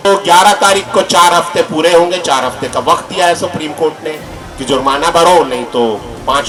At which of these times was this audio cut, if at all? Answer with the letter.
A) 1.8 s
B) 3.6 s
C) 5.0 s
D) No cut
D